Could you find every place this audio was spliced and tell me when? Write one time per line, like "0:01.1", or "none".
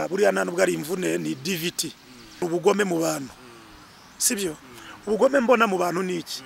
0:02.4